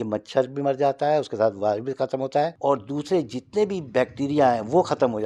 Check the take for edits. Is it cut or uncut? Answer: cut